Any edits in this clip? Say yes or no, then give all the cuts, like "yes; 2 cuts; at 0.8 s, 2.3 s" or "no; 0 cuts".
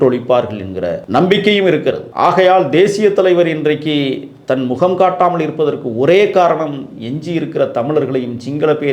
yes; 2 cuts; at 1.0 s, 2.1 s